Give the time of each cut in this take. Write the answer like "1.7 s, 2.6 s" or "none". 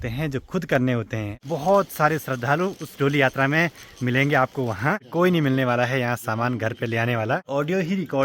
1.3 s, 5.0 s, 7.4 s